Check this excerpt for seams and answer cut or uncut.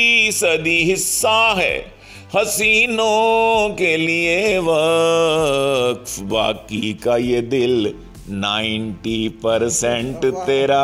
uncut